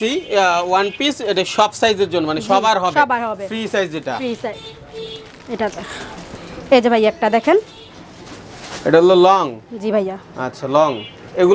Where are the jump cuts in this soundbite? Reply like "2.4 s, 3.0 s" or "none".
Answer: none